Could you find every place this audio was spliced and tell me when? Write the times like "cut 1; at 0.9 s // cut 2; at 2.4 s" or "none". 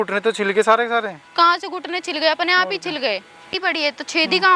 cut 1; at 3.5 s